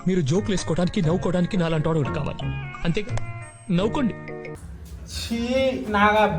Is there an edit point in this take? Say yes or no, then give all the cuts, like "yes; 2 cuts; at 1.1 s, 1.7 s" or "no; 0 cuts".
yes; 1 cut; at 4.4 s